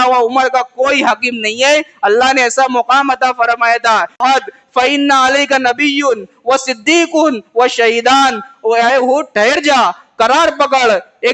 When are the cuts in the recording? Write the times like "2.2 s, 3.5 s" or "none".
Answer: 4.2 s

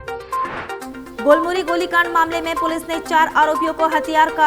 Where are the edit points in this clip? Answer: 0.9 s

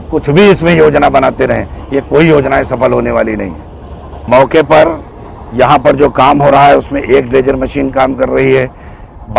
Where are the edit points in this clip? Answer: none

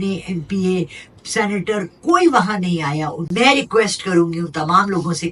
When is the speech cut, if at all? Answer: 3.2 s

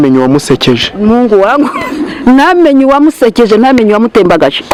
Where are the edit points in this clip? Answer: none

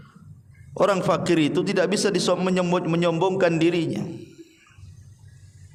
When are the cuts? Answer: none

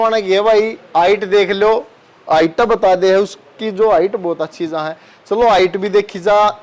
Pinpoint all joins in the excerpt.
none

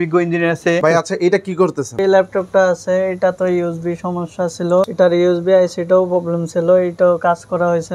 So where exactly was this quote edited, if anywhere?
0.8 s, 2.0 s, 4.9 s

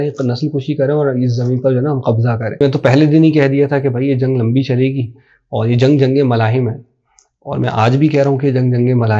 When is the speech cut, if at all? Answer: 2.6 s

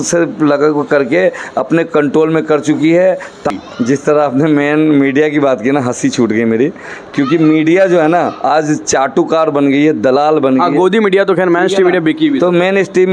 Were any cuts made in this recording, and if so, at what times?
3.5 s

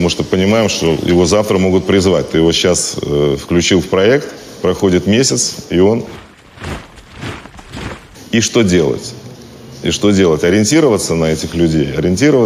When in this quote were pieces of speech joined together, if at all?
none

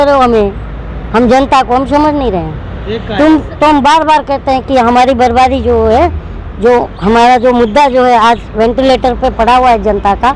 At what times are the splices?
none

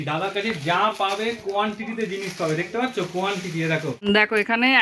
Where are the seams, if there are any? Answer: 3.9 s

